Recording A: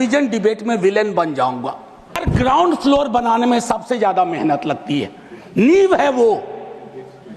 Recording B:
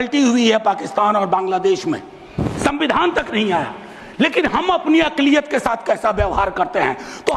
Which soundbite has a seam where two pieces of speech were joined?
A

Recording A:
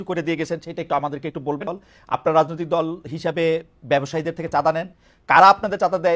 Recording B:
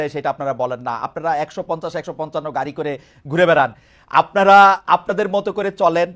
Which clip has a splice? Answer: A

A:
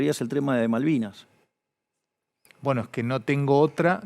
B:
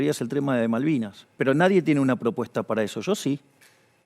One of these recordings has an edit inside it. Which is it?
B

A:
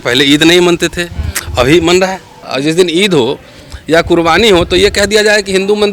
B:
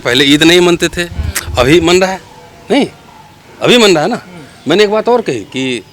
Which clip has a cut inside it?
A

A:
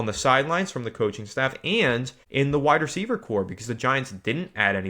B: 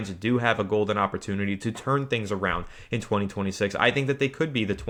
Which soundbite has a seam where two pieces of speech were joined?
A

